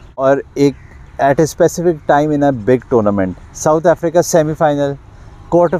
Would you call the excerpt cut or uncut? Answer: uncut